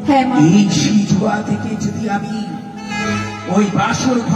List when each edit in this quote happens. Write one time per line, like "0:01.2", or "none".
none